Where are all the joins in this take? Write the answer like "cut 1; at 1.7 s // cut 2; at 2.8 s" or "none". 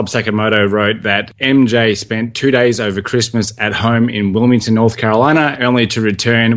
cut 1; at 1.3 s